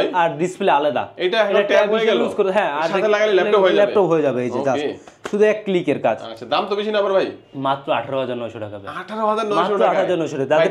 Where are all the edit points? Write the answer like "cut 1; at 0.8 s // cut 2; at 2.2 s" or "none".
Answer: none